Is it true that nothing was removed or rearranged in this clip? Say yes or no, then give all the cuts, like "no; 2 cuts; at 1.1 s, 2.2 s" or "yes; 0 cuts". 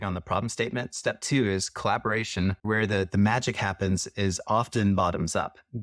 no; 1 cut; at 3.1 s